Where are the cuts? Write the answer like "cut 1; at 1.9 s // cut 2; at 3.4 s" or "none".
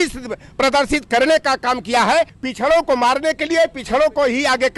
cut 1; at 2.3 s